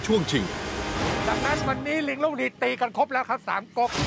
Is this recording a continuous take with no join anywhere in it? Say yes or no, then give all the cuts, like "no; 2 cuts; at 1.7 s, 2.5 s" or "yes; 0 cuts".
yes; 0 cuts